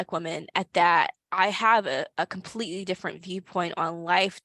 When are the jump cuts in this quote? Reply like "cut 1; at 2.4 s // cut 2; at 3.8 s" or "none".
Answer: cut 1; at 1.2 s